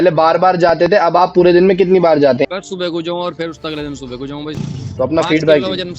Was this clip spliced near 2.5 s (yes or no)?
yes